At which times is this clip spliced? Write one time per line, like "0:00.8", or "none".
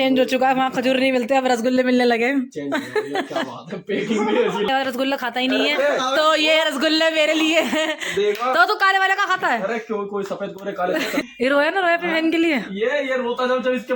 0:04.7
0:11.2

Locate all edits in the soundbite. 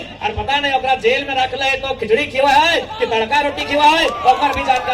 none

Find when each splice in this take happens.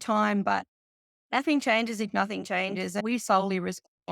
0:03.0

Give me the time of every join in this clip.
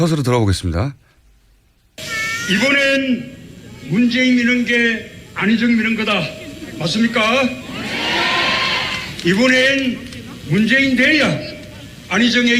0:11.2

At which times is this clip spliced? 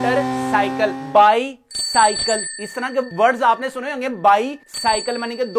none

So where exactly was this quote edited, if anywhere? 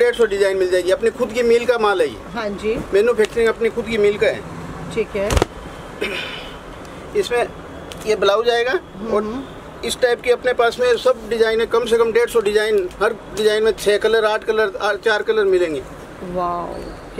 none

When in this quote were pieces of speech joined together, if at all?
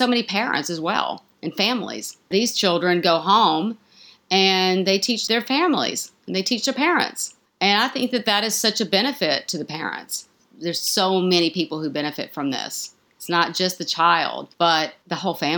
0:02.2
0:05.2
0:10.4

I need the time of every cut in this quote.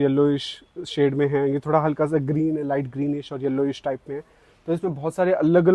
none

